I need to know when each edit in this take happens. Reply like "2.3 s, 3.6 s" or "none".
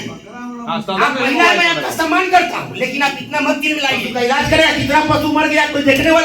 4.1 s

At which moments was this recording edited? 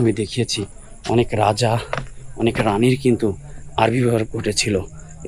none

